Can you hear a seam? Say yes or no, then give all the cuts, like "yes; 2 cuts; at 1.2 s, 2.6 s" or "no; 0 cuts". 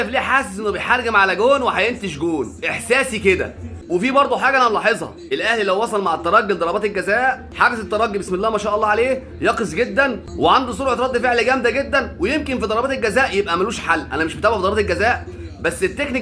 no; 0 cuts